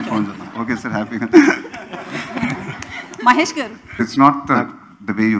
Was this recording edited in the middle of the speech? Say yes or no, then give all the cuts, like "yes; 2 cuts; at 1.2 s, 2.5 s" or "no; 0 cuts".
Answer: yes; 1 cut; at 4.0 s